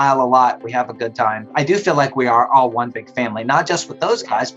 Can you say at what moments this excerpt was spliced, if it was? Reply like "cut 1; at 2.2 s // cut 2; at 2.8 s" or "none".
cut 1; at 1.5 s